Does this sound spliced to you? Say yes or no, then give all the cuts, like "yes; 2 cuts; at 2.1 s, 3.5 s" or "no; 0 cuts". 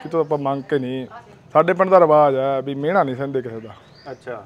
no; 0 cuts